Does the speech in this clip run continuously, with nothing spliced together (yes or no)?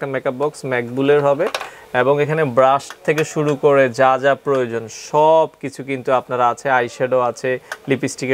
yes